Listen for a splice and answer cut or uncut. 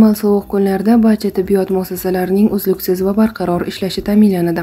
uncut